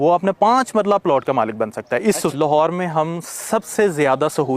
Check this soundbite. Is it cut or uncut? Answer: cut